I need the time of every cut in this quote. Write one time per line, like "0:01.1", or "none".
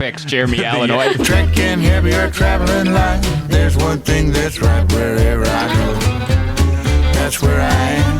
0:01.2